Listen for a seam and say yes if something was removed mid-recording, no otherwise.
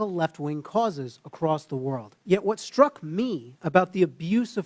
yes